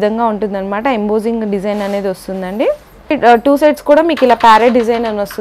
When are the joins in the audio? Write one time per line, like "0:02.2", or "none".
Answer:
none